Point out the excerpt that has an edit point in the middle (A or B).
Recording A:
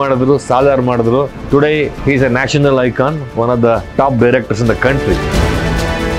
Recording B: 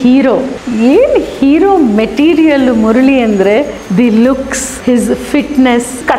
B